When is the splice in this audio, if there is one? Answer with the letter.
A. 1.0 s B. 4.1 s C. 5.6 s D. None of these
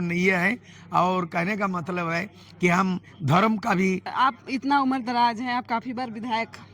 B